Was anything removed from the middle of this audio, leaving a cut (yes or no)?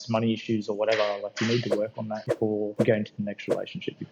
yes